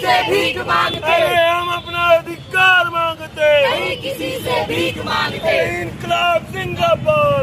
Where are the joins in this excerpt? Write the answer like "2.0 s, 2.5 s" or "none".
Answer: none